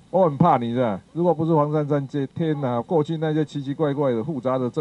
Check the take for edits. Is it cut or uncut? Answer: cut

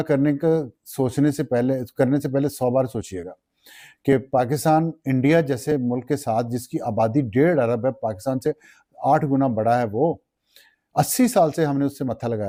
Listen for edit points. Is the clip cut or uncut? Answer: uncut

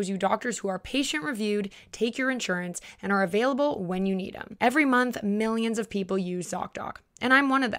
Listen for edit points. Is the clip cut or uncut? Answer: cut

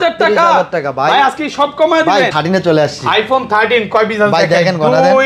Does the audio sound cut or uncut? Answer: cut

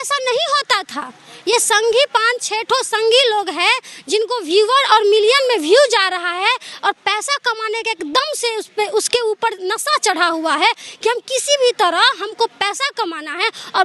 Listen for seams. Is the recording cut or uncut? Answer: uncut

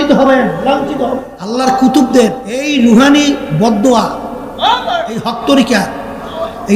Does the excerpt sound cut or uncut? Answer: cut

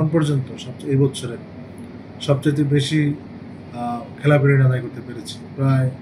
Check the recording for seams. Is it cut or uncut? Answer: uncut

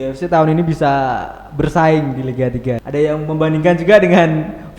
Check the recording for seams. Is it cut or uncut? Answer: cut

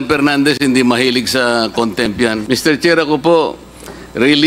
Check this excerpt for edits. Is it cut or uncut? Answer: cut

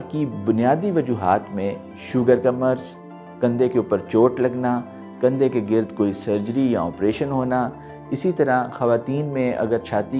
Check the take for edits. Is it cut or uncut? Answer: uncut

